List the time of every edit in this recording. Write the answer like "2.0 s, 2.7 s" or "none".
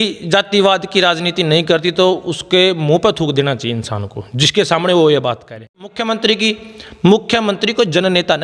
5.8 s